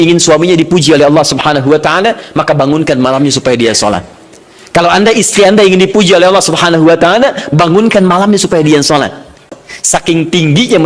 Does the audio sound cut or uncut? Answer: cut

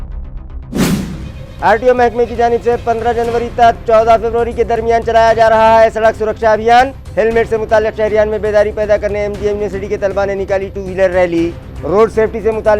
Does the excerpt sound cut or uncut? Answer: uncut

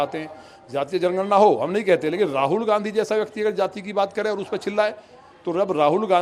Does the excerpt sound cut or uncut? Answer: uncut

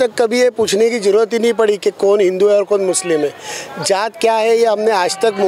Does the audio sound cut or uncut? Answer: uncut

